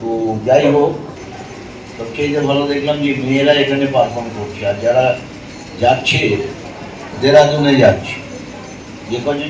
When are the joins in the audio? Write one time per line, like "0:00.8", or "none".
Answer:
0:01.2
0:07.1